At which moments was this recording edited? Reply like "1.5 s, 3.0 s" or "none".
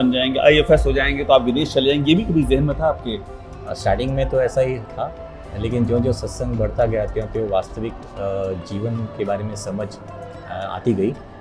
none

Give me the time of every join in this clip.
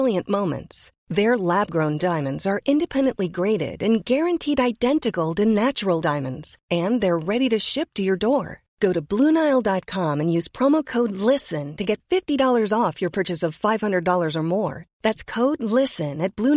none

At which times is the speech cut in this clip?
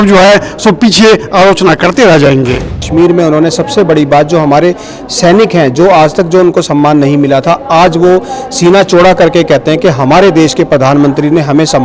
none

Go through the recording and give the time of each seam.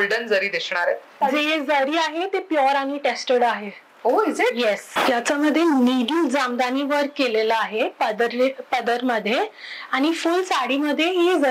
1.2 s, 4.9 s

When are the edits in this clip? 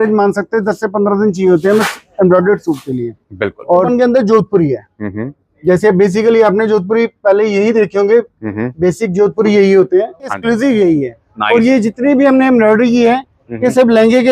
3.9 s, 10.3 s

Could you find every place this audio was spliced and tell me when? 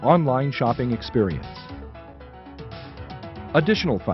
1.4 s, 3.4 s

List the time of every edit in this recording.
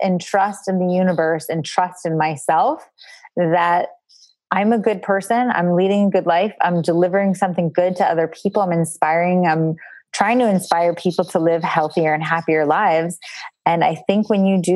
none

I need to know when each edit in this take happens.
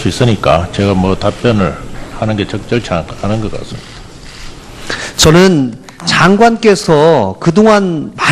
none

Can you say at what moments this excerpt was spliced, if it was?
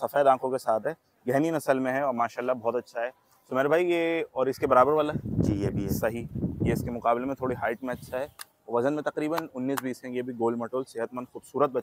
none

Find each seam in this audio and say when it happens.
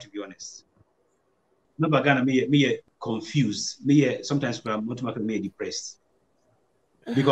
1.6 s, 2.8 s

